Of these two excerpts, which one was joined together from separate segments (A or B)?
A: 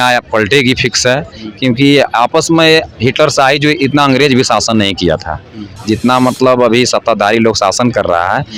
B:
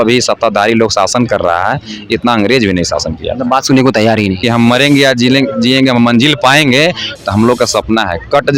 B